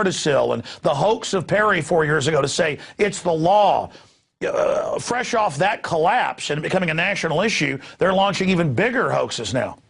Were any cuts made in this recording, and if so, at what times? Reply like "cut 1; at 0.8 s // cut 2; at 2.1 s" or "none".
none